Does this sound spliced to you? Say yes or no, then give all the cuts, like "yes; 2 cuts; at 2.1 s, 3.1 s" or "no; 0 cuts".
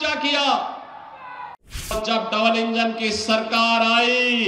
yes; 1 cut; at 1.9 s